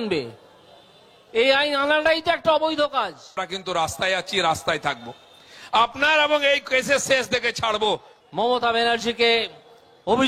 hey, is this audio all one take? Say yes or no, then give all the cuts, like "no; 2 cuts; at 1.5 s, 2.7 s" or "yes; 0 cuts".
no; 2 cuts; at 3.4 s, 8.1 s